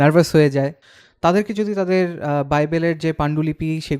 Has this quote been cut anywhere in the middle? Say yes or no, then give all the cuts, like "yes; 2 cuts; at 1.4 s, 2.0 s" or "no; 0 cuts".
yes; 1 cut; at 1.2 s